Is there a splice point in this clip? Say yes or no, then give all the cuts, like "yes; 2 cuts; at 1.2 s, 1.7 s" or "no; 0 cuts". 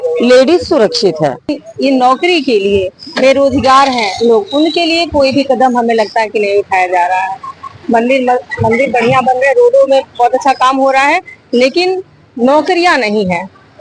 yes; 1 cut; at 1.5 s